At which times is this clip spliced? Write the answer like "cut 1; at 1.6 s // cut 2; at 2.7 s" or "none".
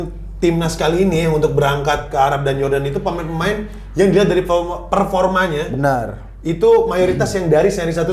none